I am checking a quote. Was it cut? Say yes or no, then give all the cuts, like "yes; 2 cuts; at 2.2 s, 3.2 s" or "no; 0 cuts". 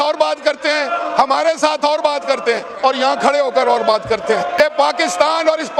yes; 1 cut; at 4.6 s